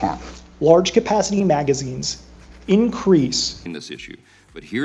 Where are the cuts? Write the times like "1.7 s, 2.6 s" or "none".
3.5 s